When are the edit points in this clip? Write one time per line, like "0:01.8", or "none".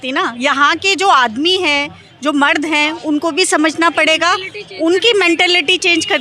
none

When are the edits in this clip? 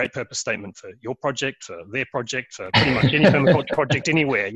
none

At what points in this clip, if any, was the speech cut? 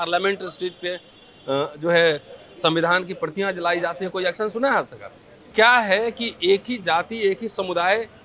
0:05.5

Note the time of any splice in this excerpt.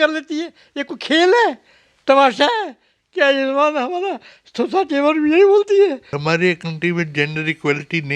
0:06.1

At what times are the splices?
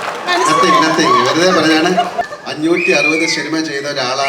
0:02.3

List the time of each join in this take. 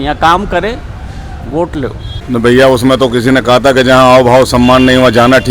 0:02.1

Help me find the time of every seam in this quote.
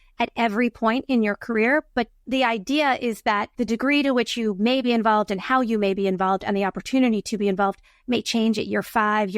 0:02.2
0:03.5

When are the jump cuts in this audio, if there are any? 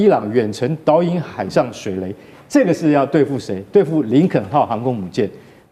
none

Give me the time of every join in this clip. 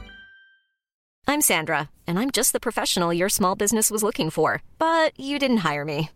0:01.0

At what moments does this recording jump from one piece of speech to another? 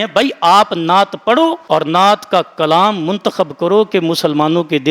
none

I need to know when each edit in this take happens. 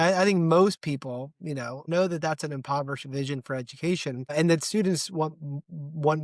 0:01.8
0:04.3

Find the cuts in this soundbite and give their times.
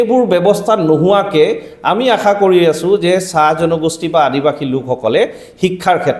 none

